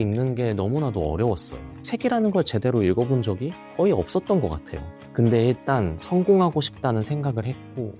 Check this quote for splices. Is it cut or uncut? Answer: cut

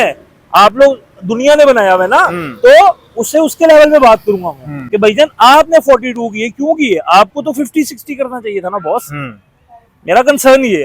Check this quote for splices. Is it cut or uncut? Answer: uncut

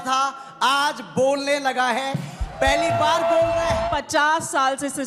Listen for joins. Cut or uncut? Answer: cut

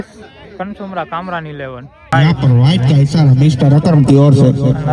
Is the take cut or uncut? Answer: cut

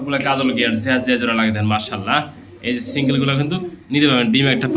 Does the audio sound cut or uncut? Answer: uncut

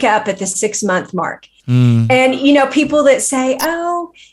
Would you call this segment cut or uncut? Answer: cut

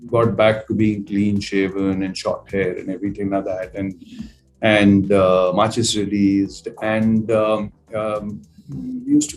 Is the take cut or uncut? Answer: uncut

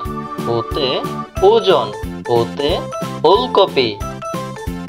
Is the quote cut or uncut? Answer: cut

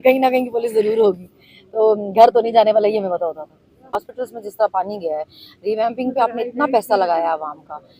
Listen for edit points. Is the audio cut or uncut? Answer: cut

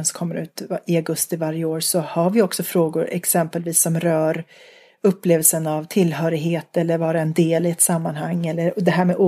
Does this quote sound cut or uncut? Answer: uncut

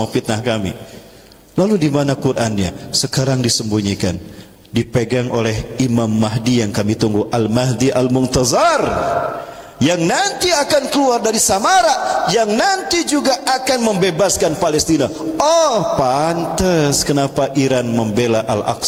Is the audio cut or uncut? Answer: uncut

